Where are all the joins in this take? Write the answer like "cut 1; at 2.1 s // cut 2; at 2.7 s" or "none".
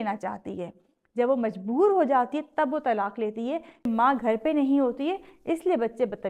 cut 1; at 3.9 s